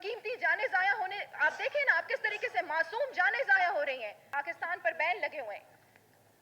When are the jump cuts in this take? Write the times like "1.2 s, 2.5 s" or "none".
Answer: 4.2 s